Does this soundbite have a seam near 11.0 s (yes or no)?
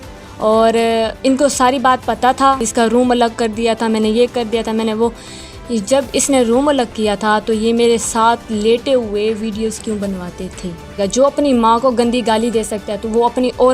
yes